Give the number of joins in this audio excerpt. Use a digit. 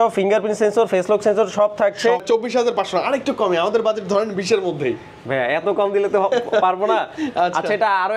1